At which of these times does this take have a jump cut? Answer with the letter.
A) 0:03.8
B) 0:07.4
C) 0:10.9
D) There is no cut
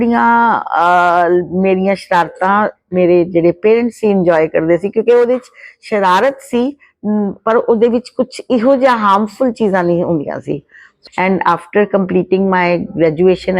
C